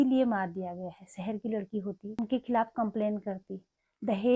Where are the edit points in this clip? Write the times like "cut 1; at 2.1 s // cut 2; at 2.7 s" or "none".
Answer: cut 1; at 2.2 s